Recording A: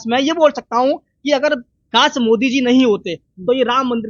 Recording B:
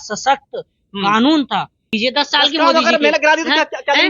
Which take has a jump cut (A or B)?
B